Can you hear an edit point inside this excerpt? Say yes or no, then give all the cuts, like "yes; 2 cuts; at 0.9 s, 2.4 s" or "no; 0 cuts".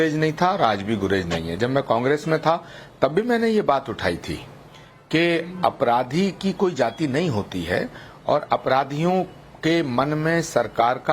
yes; 1 cut; at 3.5 s